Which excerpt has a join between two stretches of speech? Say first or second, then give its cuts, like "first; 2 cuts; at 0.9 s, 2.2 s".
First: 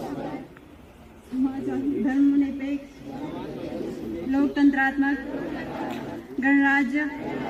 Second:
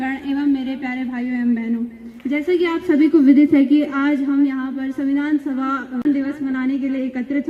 second; 1 cut; at 6.0 s